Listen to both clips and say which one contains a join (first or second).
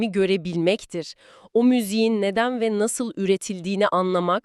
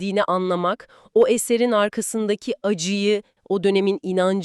second